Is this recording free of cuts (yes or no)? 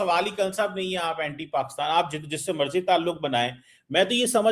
yes